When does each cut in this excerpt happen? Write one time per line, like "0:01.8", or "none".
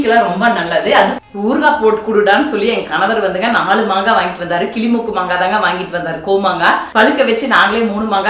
0:01.2
0:06.9